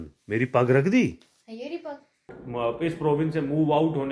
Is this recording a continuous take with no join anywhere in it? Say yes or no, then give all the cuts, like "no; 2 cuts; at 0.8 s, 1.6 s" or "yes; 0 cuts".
no; 1 cut; at 2.4 s